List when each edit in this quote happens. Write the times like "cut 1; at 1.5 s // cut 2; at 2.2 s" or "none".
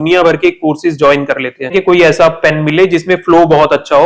cut 1; at 1.7 s

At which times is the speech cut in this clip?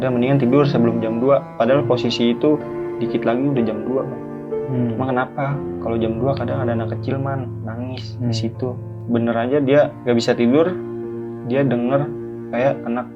cut 1; at 9.0 s // cut 2; at 10.0 s

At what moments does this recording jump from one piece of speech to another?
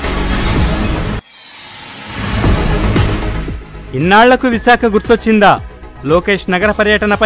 cut 1; at 1.2 s // cut 2; at 2.9 s

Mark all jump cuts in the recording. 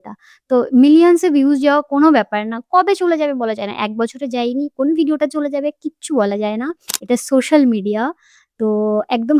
none

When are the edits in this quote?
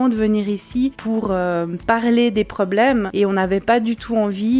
cut 1; at 1.0 s

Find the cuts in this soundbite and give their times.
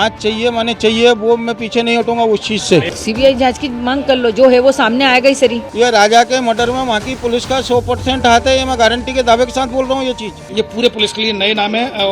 cut 1; at 2.9 s // cut 2; at 5.6 s // cut 3; at 10.4 s

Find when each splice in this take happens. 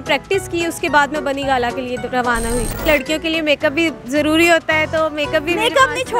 cut 1; at 2.8 s

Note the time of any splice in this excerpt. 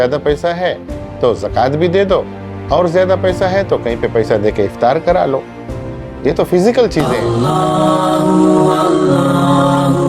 cut 1; at 7.1 s

